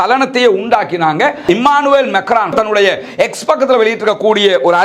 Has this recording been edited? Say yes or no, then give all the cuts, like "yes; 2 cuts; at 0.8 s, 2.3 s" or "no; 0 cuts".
yes; 2 cuts; at 1.4 s, 2.5 s